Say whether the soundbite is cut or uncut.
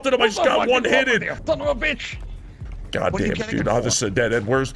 cut